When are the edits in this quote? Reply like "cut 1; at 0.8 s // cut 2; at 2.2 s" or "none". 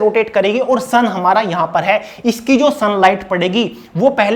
none